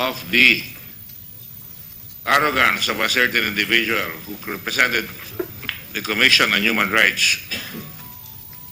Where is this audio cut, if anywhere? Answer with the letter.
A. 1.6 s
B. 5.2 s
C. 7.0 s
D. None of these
B